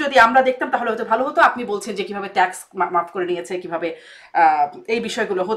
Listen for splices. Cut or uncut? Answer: uncut